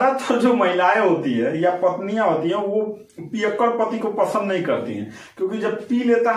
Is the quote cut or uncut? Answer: uncut